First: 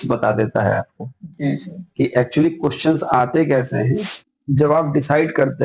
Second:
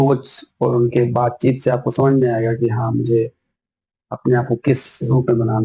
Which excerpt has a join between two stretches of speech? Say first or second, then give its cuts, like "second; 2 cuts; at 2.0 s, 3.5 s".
first; 1 cut; at 4.0 s